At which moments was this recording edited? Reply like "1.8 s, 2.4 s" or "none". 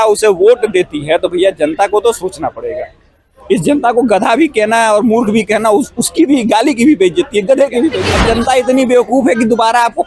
8.1 s

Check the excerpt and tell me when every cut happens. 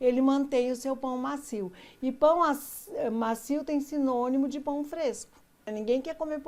5.5 s

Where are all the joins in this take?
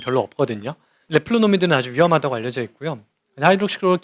0.9 s

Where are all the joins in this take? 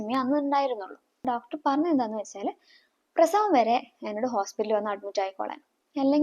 1.2 s

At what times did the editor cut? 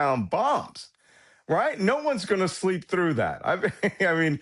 none

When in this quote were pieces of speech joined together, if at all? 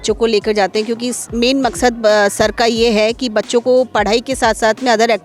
none

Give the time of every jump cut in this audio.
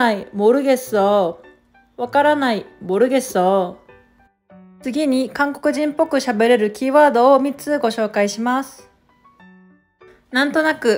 8.8 s, 10.3 s

